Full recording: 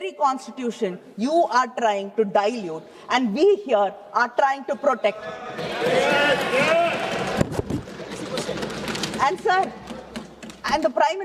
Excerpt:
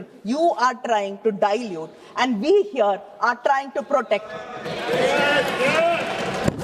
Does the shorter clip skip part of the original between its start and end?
no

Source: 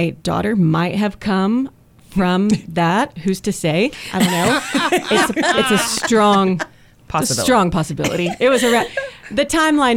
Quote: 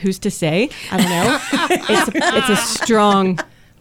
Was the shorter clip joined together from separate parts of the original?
no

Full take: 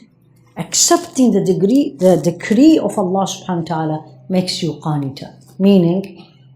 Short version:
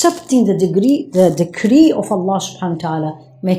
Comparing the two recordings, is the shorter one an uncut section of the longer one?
yes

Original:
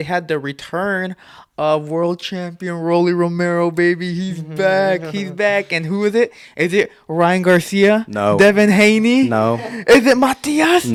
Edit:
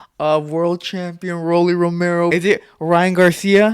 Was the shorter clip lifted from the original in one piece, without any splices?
no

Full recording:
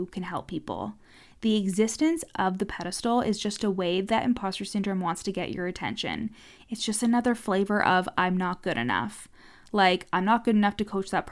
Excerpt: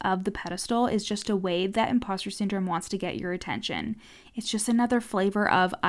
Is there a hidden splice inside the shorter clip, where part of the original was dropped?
no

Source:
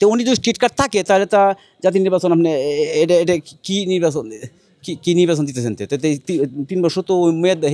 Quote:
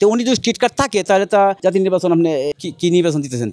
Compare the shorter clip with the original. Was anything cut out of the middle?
yes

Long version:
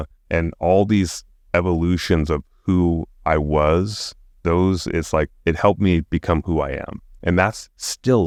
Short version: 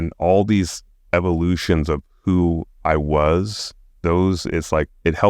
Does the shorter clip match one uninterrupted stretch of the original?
yes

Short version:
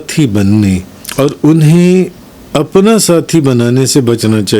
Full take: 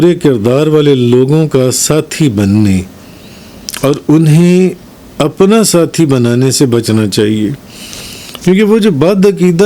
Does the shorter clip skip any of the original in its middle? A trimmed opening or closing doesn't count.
yes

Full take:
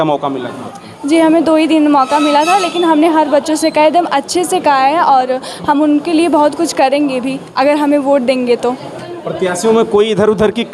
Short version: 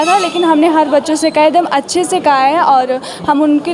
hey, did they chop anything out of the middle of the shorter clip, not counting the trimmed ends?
no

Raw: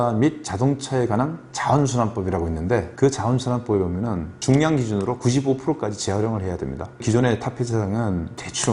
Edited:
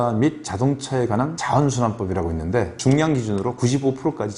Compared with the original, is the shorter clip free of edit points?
no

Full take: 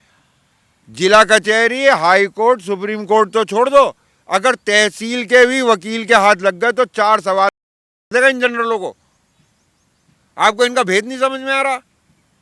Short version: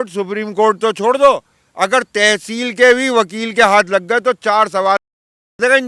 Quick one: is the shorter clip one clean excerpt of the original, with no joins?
yes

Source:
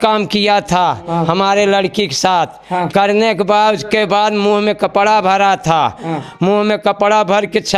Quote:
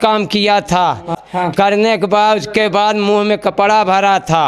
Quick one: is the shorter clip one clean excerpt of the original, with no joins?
no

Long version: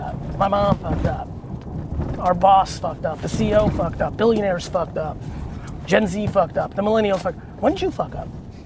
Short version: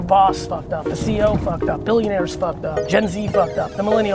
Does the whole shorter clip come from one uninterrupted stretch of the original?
no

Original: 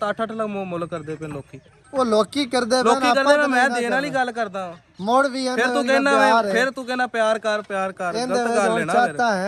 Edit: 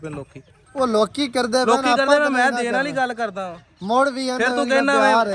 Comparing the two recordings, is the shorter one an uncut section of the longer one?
yes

